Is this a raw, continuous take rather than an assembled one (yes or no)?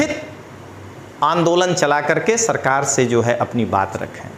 yes